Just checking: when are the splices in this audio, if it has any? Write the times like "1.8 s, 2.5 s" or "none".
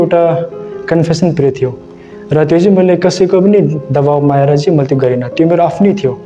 none